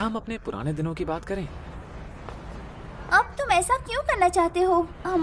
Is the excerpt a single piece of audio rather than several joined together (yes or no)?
yes